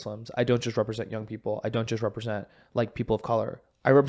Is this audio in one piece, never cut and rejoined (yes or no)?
yes